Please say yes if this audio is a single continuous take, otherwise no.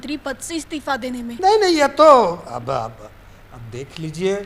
yes